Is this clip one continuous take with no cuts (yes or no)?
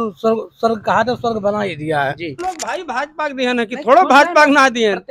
no